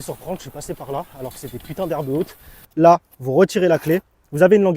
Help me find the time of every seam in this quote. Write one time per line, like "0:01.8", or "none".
0:02.6